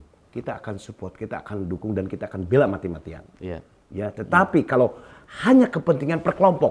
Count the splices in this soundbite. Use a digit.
0